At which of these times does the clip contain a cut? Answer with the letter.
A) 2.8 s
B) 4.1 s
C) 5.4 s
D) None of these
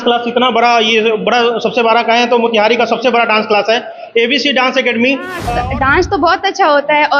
C